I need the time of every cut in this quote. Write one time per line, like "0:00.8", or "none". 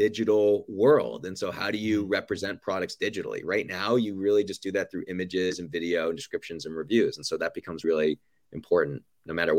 0:07.8